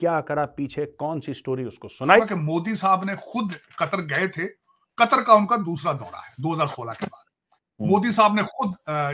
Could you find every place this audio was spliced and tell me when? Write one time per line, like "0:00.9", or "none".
0:02.2